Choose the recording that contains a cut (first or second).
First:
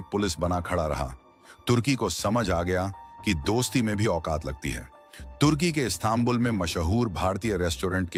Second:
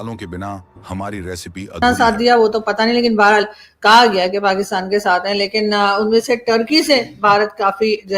second